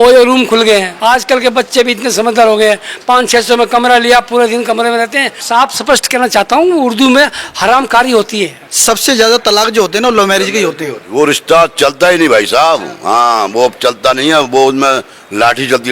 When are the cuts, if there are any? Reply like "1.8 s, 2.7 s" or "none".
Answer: 0.9 s, 5.4 s, 8.7 s, 11.0 s